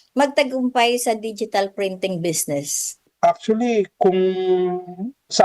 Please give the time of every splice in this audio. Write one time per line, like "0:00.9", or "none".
0:03.1